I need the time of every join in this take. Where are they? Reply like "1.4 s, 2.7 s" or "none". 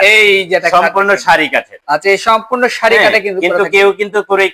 none